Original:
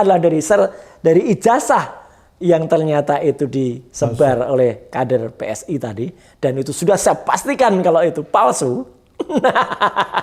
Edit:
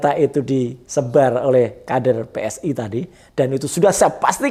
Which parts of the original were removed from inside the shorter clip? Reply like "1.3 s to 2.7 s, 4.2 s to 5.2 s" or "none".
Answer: none